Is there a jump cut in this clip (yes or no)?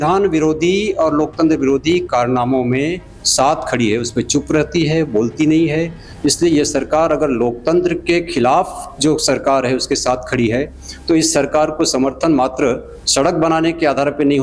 no